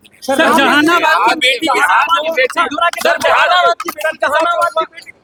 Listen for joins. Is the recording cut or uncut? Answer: uncut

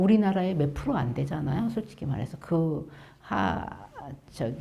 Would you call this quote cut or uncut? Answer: uncut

